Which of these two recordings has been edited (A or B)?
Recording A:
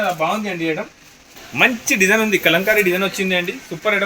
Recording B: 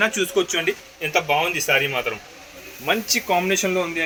A